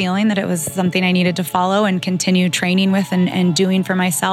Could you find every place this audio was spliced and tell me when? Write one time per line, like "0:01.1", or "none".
none